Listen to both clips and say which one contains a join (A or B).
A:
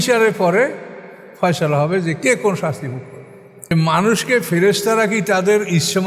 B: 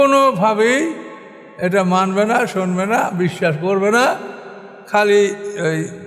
A